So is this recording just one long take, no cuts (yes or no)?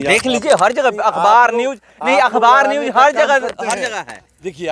yes